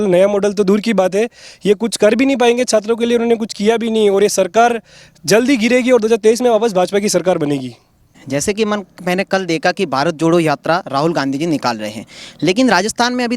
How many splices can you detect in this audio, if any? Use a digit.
1